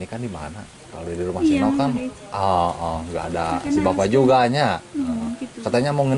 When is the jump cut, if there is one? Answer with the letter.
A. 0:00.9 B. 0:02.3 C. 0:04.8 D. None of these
D